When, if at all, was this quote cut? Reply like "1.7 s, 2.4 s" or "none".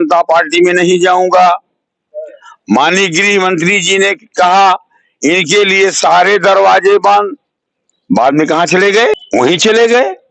9.2 s